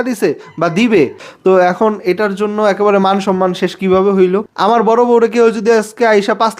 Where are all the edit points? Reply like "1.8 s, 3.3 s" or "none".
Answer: 1.3 s, 4.5 s